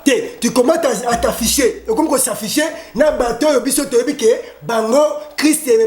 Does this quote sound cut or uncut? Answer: uncut